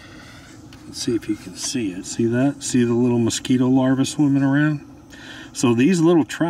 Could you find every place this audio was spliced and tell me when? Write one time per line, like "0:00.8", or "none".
0:02.0